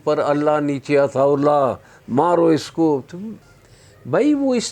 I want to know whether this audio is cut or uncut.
cut